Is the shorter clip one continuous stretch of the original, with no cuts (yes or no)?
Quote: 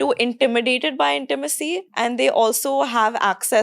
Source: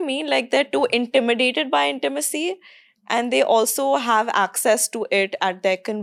no